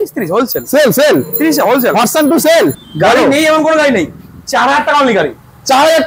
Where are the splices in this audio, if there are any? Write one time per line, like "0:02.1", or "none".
0:02.8